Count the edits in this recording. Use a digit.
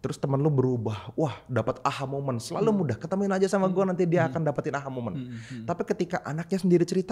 0